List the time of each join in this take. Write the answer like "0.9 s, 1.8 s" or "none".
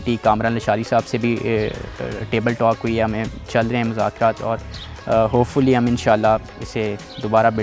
none